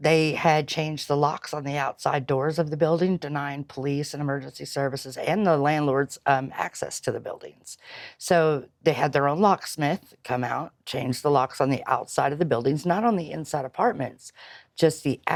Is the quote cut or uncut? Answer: uncut